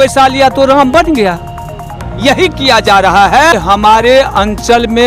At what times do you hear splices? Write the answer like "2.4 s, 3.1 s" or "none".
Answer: 3.5 s